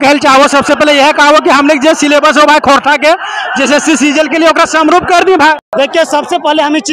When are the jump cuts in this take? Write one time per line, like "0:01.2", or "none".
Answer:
0:05.7